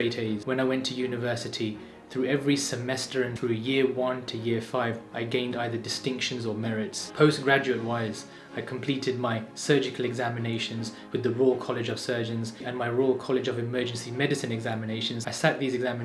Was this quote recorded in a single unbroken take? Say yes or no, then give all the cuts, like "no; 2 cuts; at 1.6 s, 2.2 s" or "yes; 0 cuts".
yes; 0 cuts